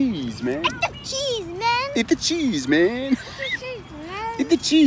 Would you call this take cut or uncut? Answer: uncut